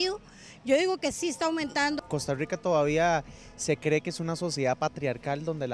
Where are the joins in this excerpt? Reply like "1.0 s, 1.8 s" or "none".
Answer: 2.0 s